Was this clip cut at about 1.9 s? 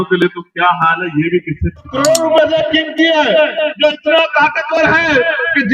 yes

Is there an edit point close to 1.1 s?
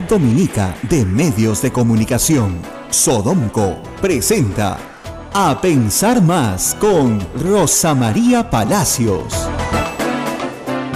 no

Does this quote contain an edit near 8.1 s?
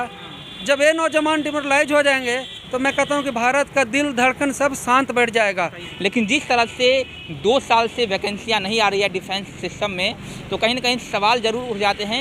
no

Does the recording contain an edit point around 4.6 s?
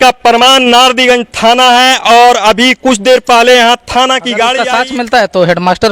yes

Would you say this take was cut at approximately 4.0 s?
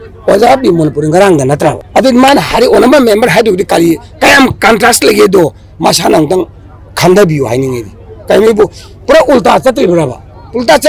no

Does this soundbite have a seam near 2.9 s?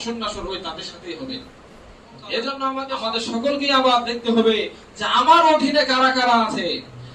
yes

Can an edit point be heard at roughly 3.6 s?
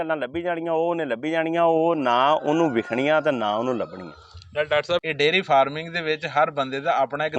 no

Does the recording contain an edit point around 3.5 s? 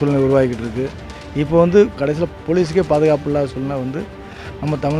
no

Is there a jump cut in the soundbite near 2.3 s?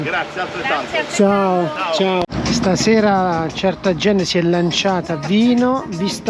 yes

